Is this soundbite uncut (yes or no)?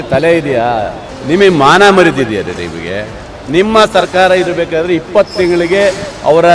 no